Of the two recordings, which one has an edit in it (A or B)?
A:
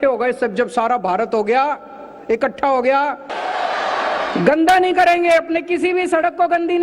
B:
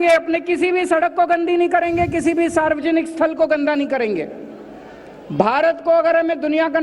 A